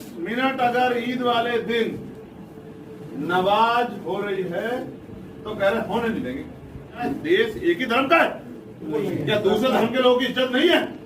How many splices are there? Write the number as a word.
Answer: two